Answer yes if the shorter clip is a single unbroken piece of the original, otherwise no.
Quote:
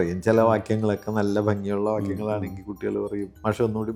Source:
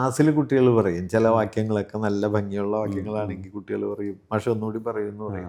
yes